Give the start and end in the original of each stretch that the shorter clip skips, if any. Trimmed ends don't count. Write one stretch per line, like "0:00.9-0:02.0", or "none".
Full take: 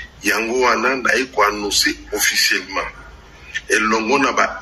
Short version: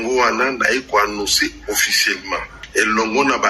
0:03.0-0:03.5